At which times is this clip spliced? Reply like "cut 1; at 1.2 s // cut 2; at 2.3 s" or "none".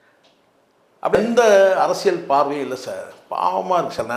cut 1; at 1.2 s